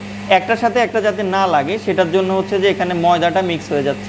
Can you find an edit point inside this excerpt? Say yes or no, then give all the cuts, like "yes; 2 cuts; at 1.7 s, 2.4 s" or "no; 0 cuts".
no; 0 cuts